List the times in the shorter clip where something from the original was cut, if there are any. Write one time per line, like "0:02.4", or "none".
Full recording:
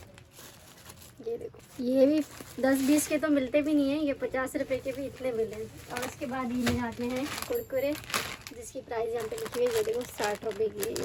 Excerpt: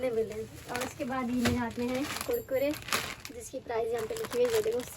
none